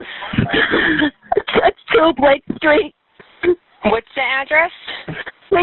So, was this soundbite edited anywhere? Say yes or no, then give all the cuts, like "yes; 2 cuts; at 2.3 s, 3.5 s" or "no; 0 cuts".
no; 0 cuts